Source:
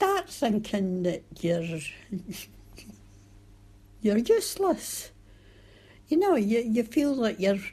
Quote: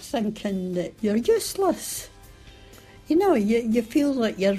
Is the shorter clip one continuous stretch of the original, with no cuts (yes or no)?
no